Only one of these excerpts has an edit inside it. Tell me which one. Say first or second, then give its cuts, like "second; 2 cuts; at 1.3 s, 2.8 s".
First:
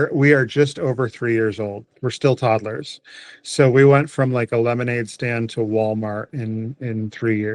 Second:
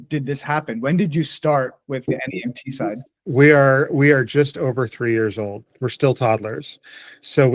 second; 1 cut; at 2.1 s